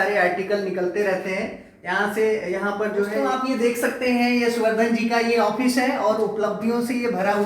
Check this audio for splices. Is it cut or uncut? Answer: cut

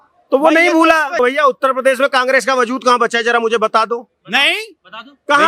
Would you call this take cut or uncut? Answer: cut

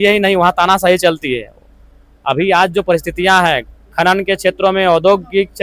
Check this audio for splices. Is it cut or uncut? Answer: uncut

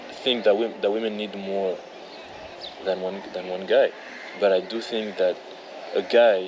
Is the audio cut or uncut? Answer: uncut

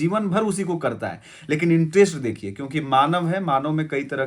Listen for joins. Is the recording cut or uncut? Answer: uncut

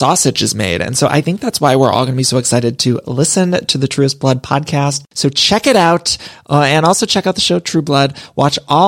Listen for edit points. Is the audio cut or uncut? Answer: uncut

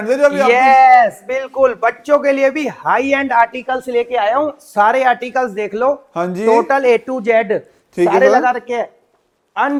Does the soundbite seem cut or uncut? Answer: uncut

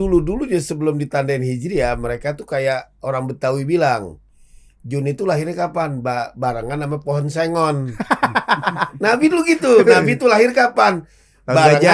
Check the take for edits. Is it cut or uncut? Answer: uncut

